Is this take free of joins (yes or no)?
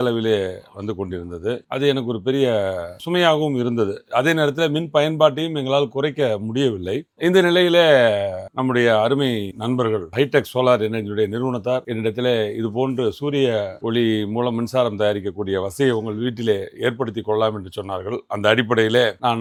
yes